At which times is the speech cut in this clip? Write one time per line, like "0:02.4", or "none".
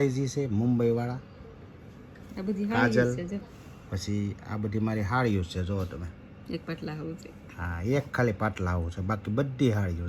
none